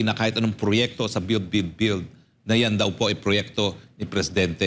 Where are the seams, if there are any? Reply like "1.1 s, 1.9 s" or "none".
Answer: none